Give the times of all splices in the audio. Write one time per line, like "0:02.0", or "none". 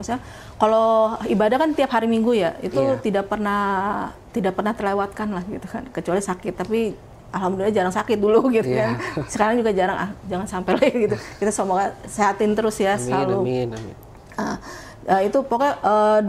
none